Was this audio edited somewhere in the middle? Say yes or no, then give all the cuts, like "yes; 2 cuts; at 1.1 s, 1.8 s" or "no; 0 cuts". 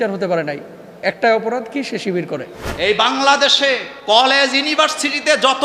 yes; 2 cuts; at 2.6 s, 3.9 s